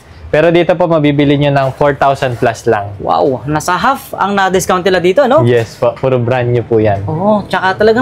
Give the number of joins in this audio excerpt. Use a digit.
0